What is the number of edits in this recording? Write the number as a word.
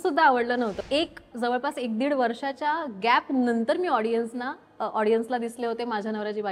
one